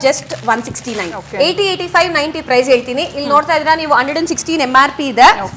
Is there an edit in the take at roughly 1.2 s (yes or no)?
yes